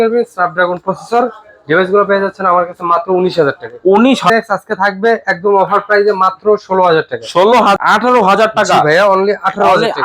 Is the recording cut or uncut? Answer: cut